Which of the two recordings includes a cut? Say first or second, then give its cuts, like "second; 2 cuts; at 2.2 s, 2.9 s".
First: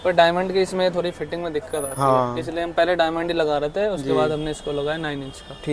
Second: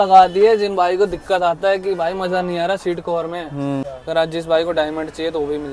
second; 1 cut; at 3.9 s